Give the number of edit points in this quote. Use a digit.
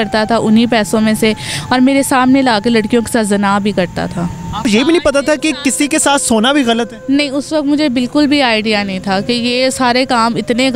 1